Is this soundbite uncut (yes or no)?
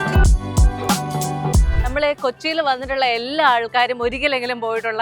no